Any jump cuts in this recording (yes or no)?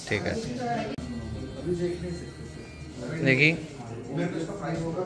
yes